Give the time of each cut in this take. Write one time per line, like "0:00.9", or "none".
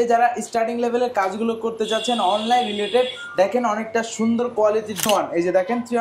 0:05.0